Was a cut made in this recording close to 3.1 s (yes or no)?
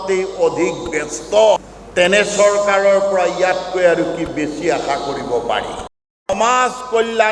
no